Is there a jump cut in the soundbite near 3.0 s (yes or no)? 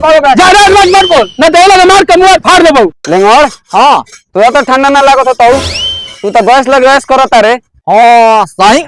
yes